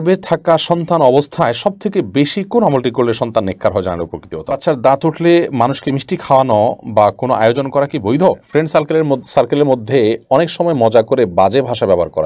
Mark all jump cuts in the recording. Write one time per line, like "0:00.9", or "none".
0:04.6
0:08.4